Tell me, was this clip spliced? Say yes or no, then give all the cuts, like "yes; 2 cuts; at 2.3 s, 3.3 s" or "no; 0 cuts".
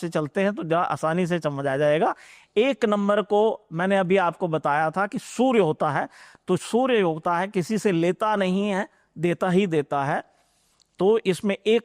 no; 0 cuts